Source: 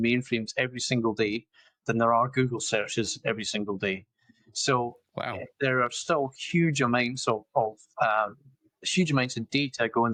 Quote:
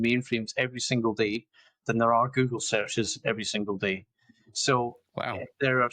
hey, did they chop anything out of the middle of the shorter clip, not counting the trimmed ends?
no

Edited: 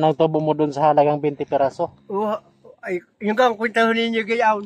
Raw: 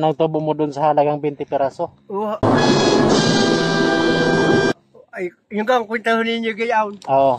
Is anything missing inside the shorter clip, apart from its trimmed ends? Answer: yes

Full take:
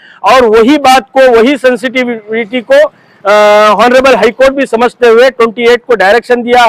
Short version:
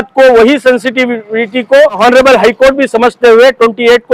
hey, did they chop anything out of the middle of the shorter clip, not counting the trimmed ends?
yes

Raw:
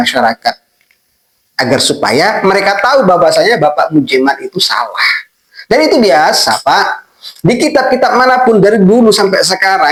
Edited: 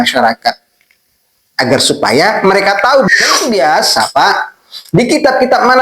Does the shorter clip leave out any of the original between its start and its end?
yes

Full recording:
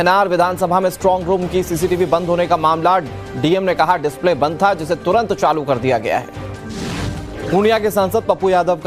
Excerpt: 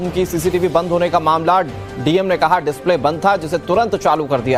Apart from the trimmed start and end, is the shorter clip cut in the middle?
no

